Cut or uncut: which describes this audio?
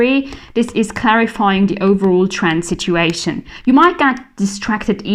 uncut